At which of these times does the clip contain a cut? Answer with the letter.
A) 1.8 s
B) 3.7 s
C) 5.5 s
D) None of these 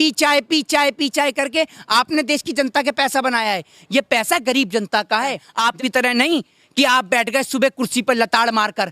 C